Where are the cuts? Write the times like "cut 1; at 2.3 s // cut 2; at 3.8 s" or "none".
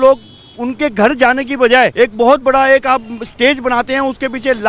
cut 1; at 1.9 s